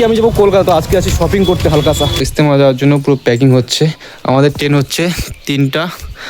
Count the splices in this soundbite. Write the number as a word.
one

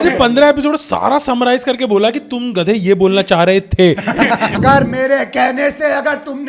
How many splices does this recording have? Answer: one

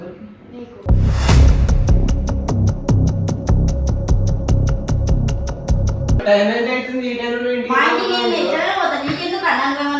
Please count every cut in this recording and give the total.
one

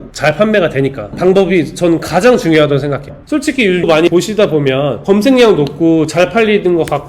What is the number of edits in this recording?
one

